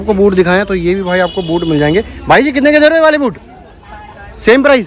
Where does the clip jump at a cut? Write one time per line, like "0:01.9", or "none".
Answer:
none